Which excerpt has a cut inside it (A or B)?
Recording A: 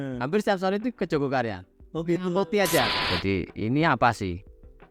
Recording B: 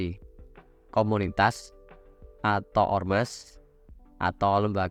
A